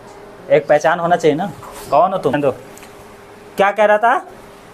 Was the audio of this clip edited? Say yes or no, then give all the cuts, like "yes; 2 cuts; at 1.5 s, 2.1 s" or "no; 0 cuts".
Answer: no; 0 cuts